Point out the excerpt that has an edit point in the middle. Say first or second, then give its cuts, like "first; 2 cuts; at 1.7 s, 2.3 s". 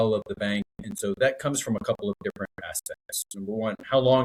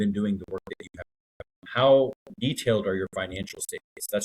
second; 2 cuts; at 1.6 s, 2.3 s